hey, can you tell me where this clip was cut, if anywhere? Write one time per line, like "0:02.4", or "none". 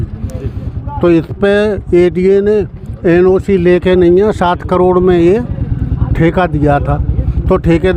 none